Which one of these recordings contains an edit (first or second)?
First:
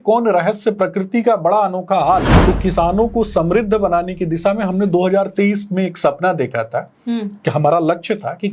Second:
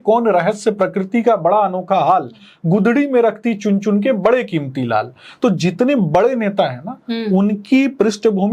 first